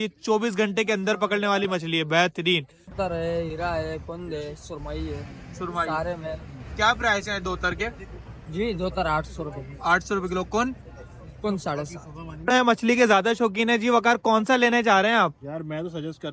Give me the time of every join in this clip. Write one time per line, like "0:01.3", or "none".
0:02.9